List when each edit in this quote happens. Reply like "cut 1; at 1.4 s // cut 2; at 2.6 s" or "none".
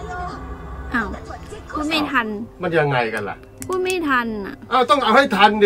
none